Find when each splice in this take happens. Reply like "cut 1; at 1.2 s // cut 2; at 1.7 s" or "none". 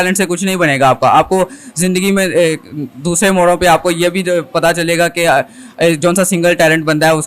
none